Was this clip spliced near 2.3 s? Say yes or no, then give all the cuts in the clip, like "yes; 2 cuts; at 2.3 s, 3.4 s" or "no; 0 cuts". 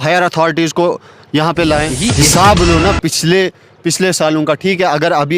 yes; 1 cut; at 2.3 s